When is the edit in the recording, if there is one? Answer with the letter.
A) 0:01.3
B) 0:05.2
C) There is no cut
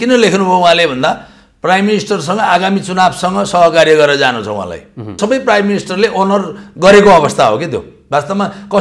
B